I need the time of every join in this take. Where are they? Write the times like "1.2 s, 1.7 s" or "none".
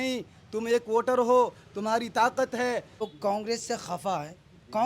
3.1 s